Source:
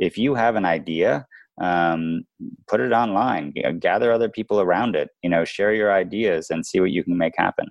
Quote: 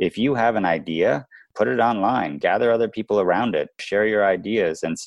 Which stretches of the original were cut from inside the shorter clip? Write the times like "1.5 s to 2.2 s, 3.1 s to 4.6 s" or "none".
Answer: 1.4 s to 2.5 s, 3.5 s to 3.8 s, 5.2 s to 5.5 s